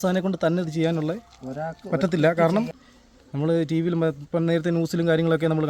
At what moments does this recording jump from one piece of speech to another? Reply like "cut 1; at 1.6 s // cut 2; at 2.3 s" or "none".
cut 1; at 2.7 s